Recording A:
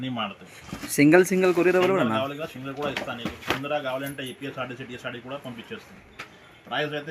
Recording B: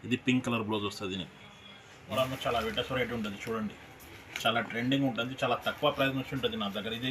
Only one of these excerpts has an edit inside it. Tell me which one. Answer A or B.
B